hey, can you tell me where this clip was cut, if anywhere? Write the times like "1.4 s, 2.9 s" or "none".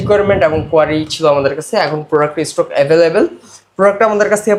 none